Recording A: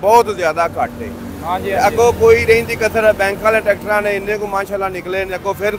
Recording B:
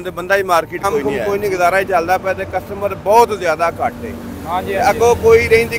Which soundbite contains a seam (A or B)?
B